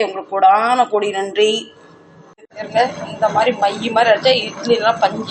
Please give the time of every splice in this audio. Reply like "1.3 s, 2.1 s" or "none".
2.5 s